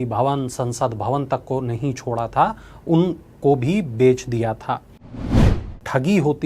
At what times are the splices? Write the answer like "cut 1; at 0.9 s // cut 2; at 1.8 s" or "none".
cut 1; at 5.5 s